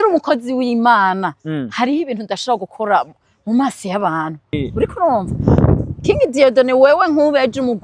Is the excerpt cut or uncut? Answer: cut